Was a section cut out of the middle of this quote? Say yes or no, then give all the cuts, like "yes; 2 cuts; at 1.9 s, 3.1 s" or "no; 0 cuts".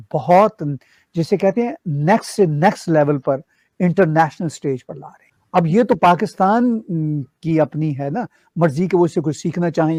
no; 0 cuts